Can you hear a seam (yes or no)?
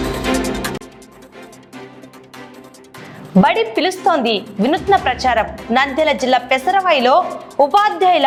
no